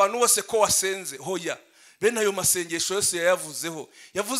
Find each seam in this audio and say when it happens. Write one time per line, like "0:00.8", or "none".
none